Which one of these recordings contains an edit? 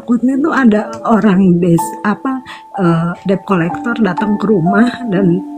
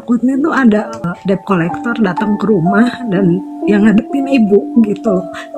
second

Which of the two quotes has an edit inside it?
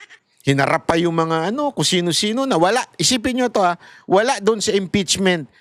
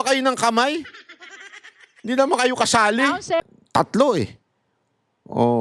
second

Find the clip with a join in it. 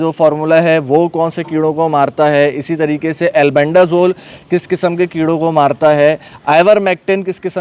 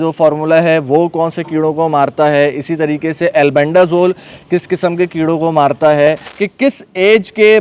second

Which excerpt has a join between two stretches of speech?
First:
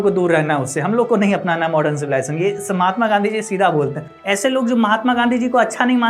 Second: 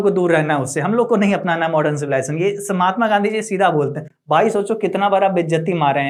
first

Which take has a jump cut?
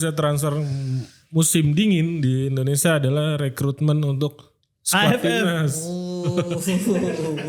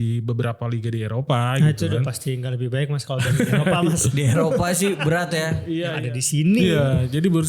second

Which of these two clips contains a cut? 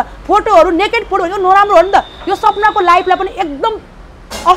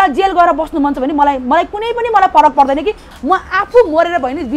second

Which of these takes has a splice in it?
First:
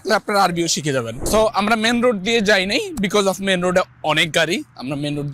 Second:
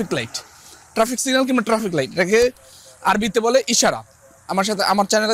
first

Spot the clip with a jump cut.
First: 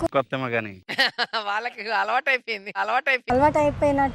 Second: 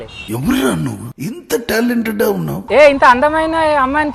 second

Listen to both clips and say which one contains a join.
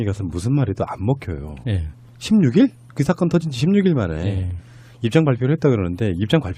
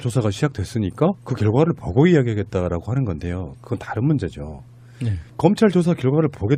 first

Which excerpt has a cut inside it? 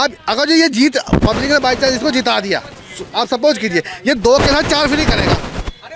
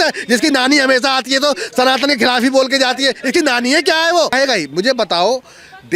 second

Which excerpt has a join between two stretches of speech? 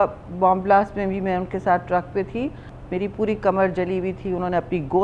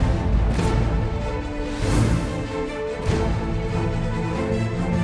first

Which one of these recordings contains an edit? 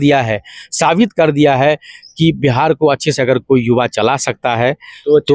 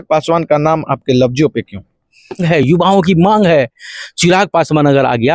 second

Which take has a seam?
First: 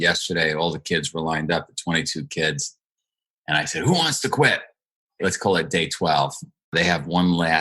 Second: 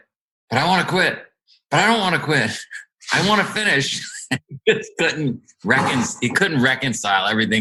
first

